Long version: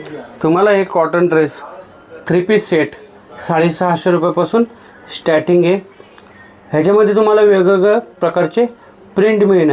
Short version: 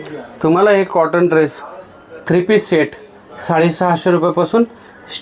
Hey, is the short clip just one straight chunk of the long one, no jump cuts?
yes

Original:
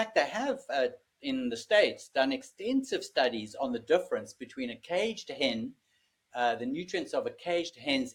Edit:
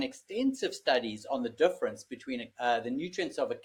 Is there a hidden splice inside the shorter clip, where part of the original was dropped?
yes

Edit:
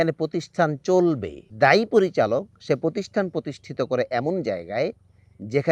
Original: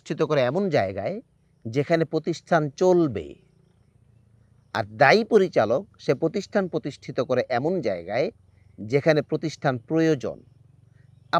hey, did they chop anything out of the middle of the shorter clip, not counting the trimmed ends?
yes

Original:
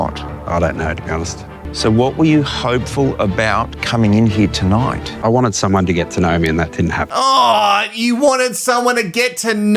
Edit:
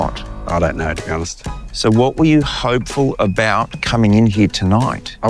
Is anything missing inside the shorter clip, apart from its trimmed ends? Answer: no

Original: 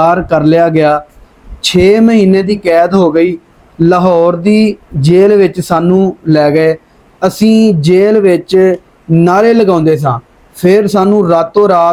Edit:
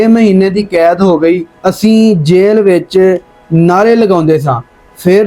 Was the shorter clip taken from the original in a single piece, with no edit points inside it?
no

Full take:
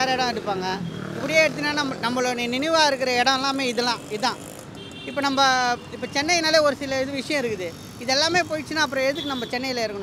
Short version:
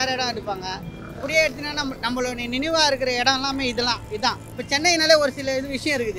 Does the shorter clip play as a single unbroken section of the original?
no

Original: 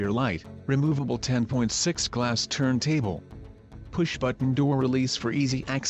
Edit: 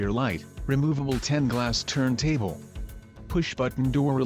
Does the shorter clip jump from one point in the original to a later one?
yes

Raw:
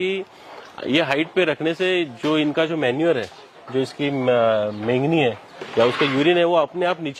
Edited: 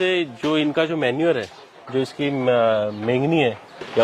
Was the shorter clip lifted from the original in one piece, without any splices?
yes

